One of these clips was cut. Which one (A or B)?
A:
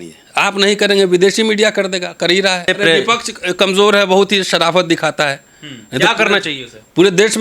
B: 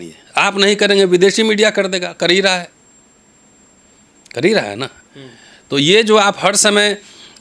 A